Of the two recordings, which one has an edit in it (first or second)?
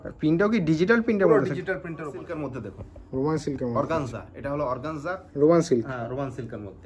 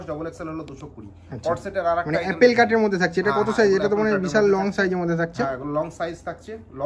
first